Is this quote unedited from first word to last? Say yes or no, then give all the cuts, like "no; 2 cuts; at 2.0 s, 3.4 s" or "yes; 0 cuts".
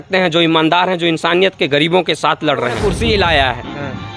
no; 1 cut; at 2.9 s